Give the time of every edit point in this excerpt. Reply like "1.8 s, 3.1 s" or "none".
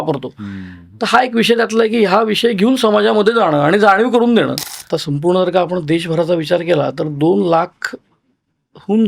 4.9 s